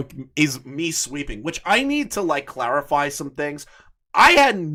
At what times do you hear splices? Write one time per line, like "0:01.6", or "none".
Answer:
none